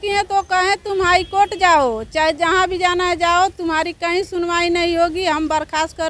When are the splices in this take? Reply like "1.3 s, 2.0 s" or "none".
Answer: none